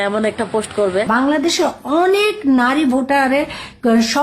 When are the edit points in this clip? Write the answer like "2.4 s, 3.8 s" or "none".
1.1 s